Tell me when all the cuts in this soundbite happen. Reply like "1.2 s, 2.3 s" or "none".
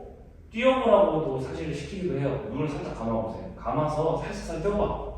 3.5 s